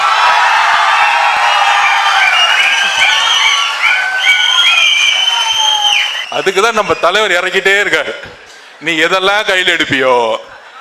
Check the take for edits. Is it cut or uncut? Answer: cut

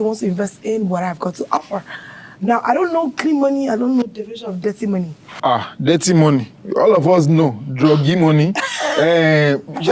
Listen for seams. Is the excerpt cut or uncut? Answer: cut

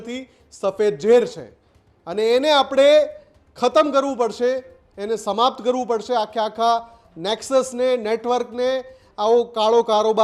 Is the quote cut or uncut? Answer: uncut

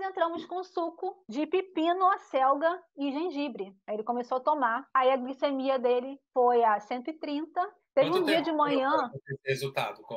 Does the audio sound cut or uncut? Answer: uncut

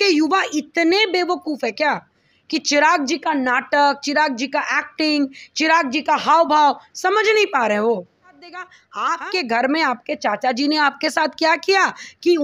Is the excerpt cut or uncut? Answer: cut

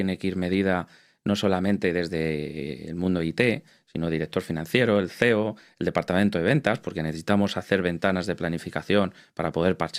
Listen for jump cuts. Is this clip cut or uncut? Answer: uncut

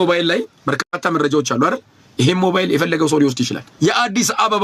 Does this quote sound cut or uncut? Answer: cut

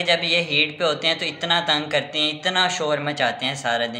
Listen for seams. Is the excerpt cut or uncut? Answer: uncut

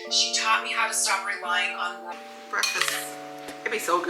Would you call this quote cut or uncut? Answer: cut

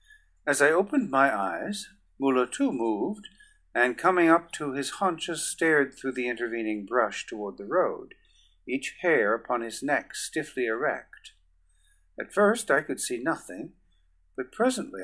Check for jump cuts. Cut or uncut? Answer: uncut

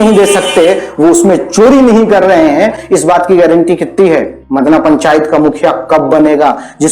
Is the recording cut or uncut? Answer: cut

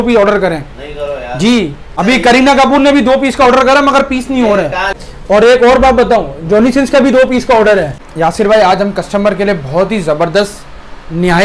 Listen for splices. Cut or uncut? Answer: cut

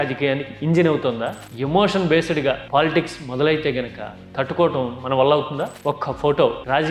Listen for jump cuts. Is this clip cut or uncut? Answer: cut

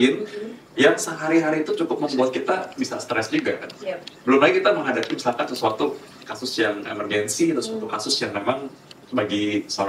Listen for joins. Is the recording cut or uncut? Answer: uncut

